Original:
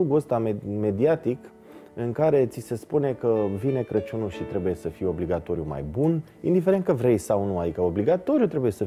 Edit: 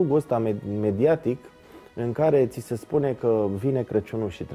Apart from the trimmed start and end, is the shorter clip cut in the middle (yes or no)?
no